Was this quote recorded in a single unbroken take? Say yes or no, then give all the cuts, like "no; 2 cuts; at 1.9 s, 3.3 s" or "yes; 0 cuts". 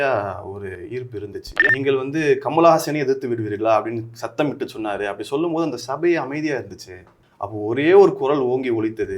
no; 1 cut; at 1.7 s